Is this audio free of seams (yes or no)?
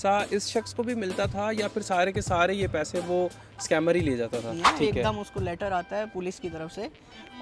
no